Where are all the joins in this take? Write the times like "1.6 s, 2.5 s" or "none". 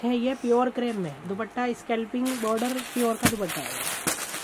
none